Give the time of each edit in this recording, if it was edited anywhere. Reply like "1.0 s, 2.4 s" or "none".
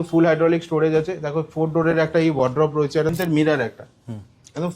3.1 s